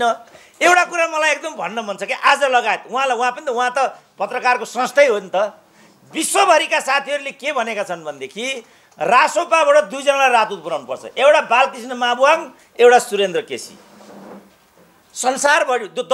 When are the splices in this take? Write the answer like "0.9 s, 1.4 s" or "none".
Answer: none